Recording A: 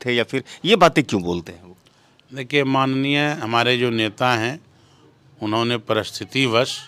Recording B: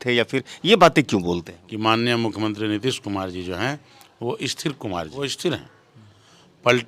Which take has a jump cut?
B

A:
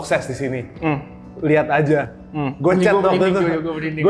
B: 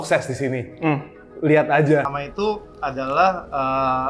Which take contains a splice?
B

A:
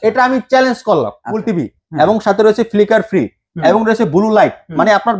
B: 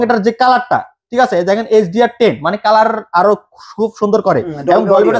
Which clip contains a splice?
A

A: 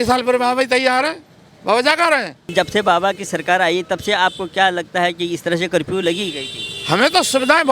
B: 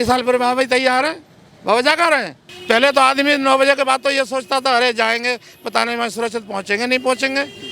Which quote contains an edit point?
B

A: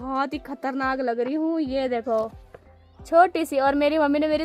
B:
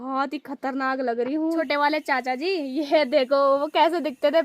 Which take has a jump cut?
B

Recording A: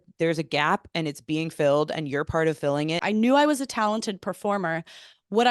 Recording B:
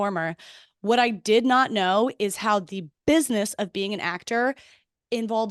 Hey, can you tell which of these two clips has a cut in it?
A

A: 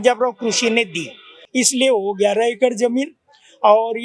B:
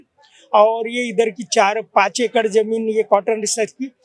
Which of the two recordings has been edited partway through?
A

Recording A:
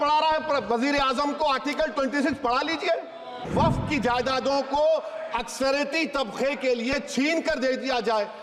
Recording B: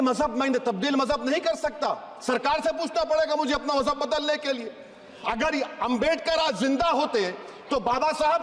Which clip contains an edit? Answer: A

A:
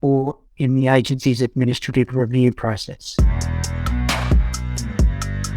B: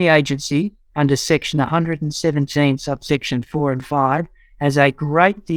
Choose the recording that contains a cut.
A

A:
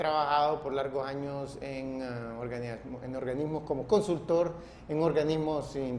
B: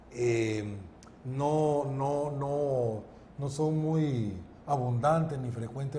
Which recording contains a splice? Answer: A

